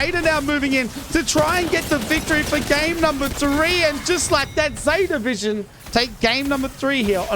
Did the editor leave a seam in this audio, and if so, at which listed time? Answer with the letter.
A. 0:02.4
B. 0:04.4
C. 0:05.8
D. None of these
C